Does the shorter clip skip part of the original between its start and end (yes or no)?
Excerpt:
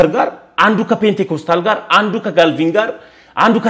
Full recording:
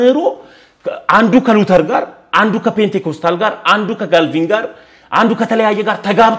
no